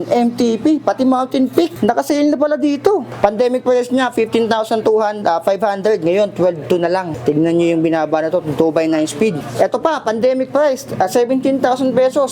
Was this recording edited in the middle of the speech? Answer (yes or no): yes